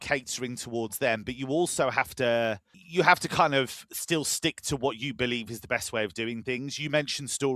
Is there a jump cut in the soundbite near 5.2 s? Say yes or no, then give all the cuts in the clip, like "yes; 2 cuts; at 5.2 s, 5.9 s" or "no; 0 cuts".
no; 1 cut; at 2.7 s